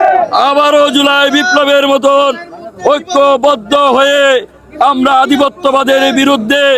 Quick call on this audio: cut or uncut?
uncut